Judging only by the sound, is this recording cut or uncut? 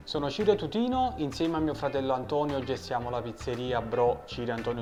uncut